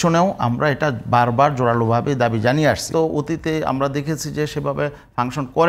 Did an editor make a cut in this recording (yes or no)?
yes